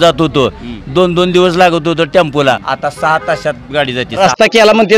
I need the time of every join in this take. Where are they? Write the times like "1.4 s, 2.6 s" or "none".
2.7 s, 4.2 s